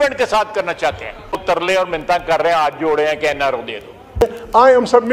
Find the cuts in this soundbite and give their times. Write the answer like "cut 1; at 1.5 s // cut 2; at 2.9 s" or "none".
cut 1; at 1.4 s // cut 2; at 4.2 s